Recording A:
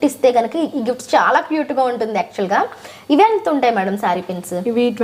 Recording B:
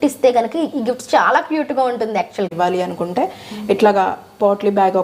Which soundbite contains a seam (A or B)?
B